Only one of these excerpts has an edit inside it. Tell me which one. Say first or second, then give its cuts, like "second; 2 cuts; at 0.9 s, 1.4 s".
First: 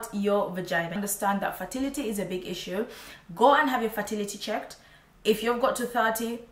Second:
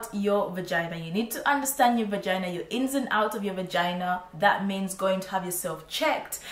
first; 1 cut; at 1.0 s